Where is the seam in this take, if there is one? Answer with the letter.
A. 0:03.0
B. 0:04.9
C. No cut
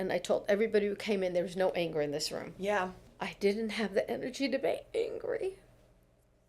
A